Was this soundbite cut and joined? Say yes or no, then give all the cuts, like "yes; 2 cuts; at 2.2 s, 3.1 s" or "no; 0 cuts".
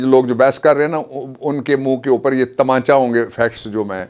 no; 0 cuts